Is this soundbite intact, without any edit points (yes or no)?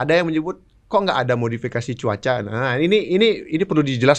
yes